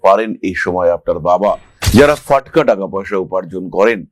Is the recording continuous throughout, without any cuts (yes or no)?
no